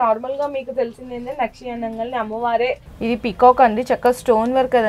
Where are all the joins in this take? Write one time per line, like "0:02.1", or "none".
0:02.9